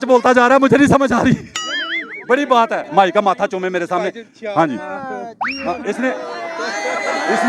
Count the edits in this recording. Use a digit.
1